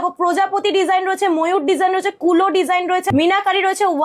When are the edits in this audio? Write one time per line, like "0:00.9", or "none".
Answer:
0:03.1